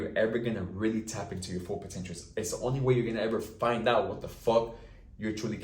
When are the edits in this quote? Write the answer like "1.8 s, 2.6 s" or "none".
none

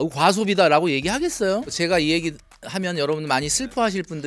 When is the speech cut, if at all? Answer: none

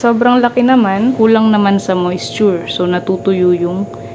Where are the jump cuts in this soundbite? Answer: 1.1 s

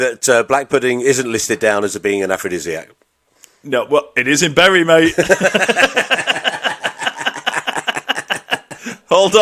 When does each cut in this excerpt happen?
none

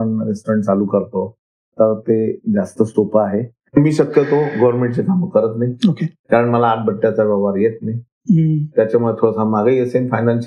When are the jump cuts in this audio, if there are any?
3.8 s

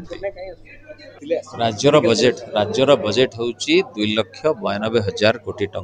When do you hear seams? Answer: 1.2 s

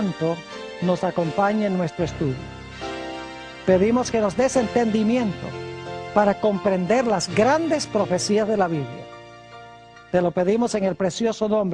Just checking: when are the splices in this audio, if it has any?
1.1 s

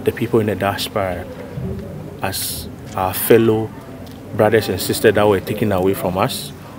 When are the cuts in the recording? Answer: none

